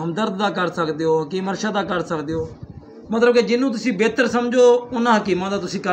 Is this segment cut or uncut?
uncut